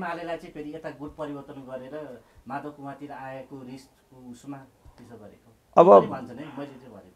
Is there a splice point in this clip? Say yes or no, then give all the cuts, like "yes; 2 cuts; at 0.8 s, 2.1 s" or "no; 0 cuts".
no; 0 cuts